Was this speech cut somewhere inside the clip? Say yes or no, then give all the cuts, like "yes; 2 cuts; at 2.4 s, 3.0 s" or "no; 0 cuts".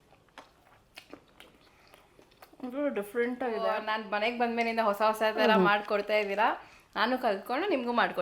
yes; 1 cut; at 3.9 s